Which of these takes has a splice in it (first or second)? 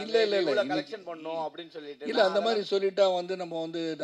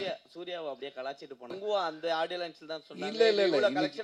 second